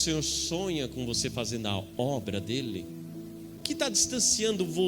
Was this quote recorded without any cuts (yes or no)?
no